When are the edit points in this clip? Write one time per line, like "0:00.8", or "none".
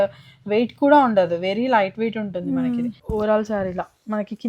0:03.0